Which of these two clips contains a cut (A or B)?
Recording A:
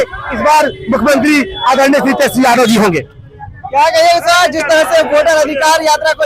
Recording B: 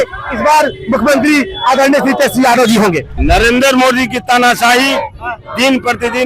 B